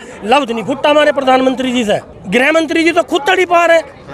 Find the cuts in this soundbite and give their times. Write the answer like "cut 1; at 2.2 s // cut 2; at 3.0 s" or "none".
cut 1; at 2.1 s